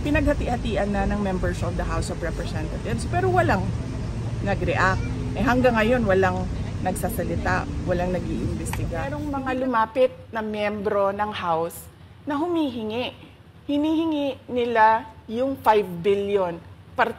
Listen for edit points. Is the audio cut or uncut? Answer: cut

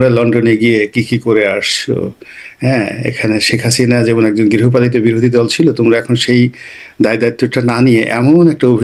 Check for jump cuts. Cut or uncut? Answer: uncut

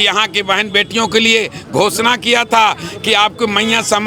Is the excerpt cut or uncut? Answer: uncut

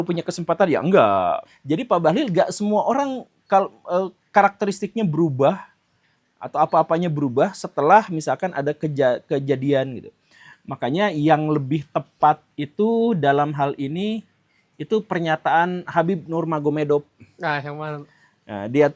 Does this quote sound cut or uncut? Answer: cut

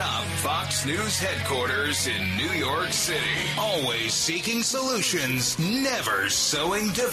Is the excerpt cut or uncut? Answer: uncut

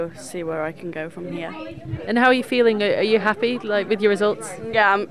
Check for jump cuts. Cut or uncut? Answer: uncut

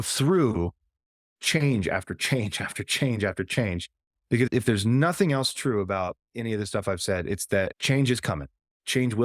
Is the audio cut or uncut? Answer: cut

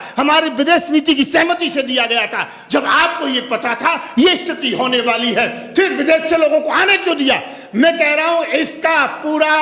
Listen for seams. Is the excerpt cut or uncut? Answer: uncut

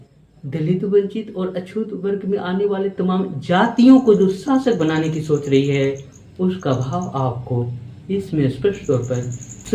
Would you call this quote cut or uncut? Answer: uncut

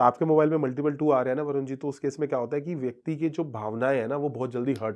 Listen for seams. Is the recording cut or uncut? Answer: uncut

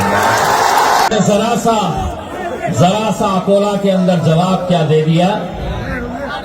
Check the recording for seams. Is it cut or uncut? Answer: cut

